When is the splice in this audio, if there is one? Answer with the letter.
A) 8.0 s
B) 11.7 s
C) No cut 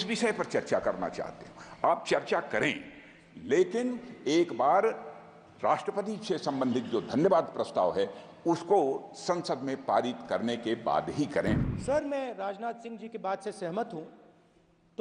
B